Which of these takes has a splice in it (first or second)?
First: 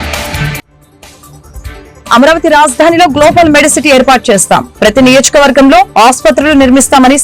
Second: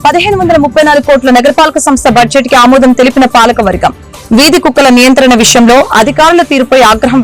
first